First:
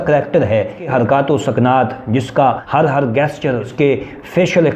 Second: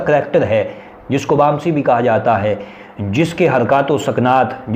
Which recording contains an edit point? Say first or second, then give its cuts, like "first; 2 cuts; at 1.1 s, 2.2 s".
first; 3 cuts; at 0.9 s, 2.6 s, 3.7 s